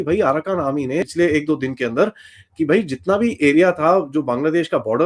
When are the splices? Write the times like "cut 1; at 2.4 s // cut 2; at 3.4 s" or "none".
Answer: cut 1; at 1.1 s